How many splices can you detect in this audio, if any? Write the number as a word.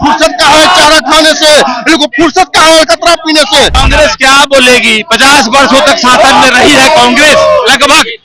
one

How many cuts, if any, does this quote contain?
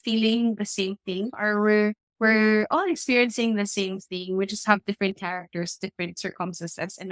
one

